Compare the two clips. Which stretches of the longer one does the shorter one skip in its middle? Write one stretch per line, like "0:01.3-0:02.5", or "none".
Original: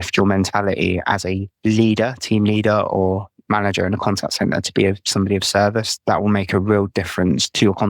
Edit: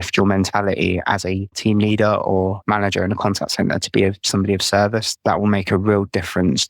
0:01.5-0:02.2
0:03.2-0:03.4